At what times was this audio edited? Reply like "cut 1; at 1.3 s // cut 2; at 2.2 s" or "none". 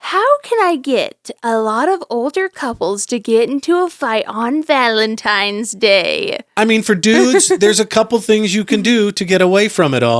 none